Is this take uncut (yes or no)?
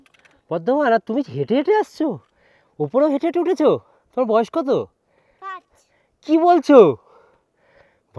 yes